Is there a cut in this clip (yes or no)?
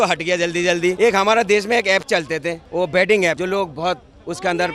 yes